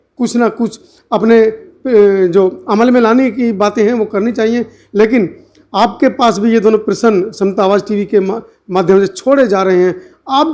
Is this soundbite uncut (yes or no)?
yes